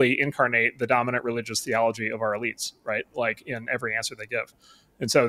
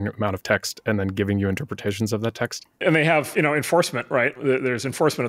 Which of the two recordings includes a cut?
second; 2 cuts; at 2.8 s, 4.3 s

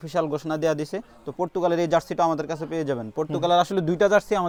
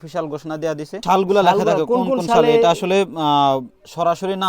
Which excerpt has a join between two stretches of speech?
second; 1 cut; at 1.0 s

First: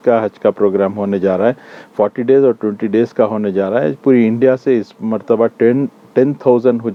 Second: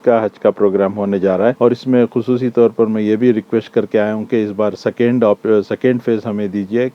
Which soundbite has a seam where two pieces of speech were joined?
second; 1 cut; at 1.6 s

